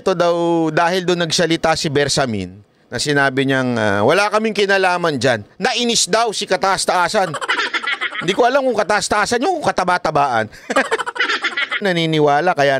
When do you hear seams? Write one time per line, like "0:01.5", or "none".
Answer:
0:11.8